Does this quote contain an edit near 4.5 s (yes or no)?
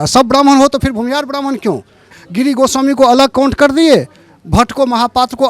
no